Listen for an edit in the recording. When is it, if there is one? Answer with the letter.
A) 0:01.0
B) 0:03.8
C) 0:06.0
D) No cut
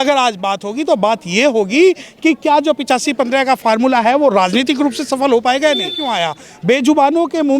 C